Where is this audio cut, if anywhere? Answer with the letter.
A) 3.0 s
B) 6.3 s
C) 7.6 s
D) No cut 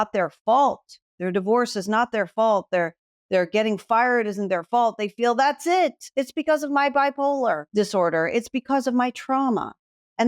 C